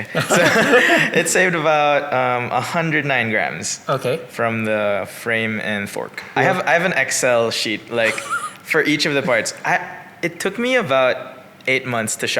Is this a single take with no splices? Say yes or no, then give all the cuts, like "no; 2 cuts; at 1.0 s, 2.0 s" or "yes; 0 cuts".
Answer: no; 1 cut; at 6.3 s